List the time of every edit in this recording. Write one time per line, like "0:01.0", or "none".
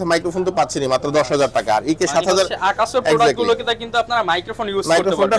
none